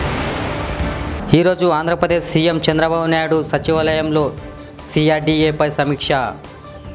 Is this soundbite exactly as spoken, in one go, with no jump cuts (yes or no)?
no